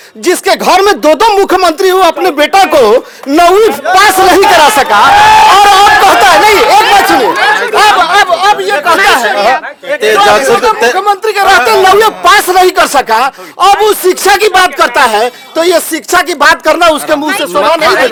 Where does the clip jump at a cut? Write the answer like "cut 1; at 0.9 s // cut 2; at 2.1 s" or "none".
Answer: none